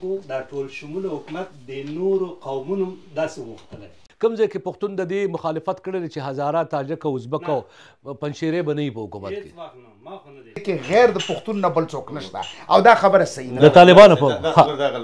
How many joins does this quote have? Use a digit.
2